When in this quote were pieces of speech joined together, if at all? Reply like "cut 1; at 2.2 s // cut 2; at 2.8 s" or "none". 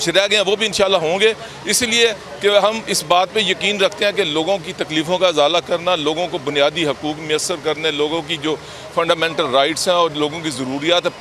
none